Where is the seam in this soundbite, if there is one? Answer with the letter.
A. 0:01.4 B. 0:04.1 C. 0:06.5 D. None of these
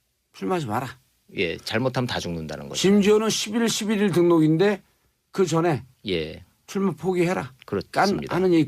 B